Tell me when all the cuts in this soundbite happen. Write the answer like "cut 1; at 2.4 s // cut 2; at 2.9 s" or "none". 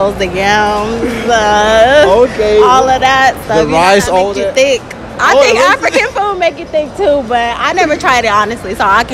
none